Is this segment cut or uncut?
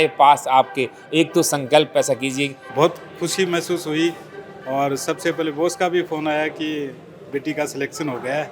cut